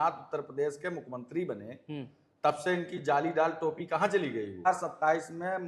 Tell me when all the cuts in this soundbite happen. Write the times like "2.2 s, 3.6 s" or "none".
4.7 s